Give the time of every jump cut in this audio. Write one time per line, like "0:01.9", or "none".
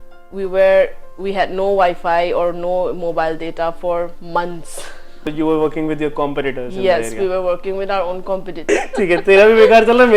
0:05.3
0:08.6